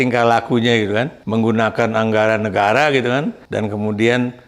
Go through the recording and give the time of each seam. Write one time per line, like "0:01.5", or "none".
0:01.2
0:03.4